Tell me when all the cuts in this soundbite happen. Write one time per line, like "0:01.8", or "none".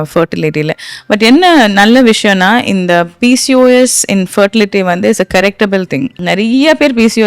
0:06.2